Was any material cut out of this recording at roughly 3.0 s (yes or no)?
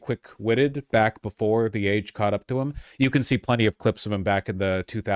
no